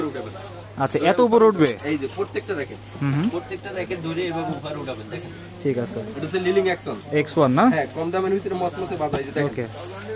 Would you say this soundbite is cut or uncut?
uncut